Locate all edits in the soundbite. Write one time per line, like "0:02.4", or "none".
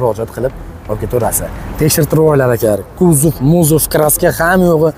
none

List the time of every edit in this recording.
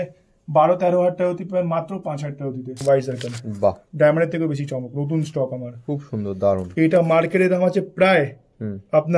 0:02.8

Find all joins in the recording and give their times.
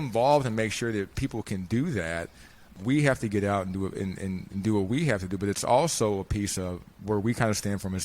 0:01.1
0:02.7

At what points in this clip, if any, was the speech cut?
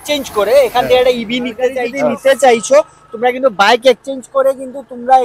0:01.9

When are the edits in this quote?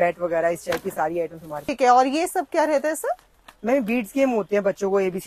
0:01.7

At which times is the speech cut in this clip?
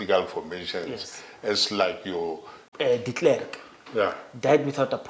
0:02.6

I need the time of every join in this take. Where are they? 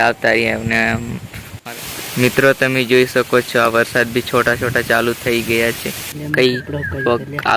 0:01.6
0:06.1

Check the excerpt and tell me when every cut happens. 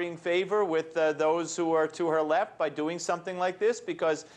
none

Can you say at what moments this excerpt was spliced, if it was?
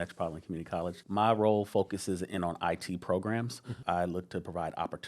0:01.0
0:03.7

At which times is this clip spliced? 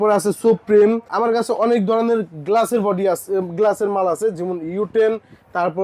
0:01.1

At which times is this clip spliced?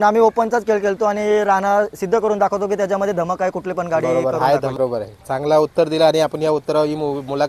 0:04.8

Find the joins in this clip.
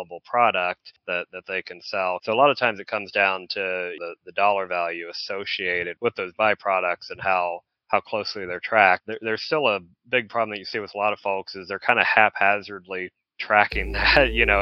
0:02.2
0:04.0
0:05.9
0:09.1

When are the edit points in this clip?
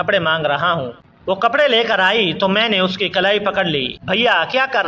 0:01.4
0:03.9

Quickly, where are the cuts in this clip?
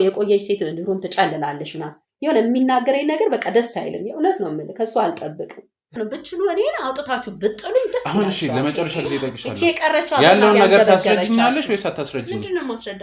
0:06.0

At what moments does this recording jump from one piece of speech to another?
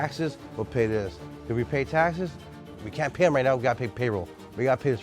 0:02.6

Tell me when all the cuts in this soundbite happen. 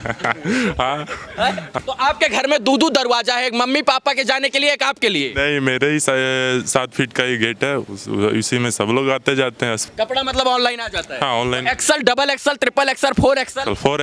0:01.7
0:09.8

